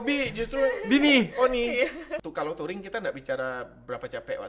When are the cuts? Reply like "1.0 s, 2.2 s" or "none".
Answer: 2.0 s